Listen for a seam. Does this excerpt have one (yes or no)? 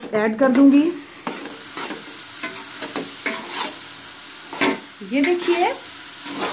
yes